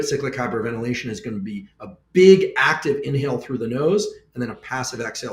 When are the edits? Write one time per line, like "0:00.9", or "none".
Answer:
none